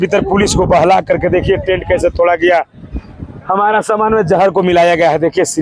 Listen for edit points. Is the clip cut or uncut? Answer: uncut